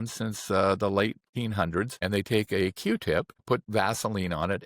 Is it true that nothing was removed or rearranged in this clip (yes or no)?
no